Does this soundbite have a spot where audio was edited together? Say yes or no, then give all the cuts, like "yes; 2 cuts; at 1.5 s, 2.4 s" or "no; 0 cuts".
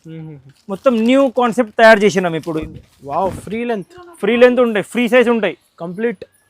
yes; 1 cut; at 2.6 s